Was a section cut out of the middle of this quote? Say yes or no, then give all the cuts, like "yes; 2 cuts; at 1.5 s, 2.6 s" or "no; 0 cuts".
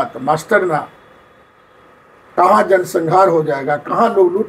no; 0 cuts